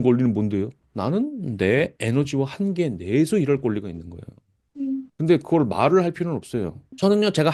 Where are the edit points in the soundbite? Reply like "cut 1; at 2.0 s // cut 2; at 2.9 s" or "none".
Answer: none